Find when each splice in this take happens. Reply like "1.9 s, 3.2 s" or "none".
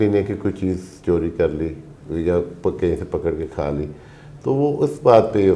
none